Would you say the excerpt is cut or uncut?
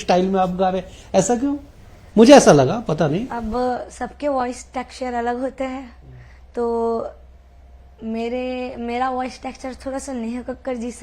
uncut